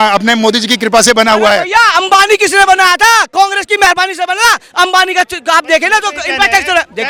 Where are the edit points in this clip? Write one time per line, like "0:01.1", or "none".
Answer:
none